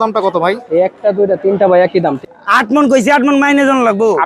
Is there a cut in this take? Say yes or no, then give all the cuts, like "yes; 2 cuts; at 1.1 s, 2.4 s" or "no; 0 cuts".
yes; 1 cut; at 2.2 s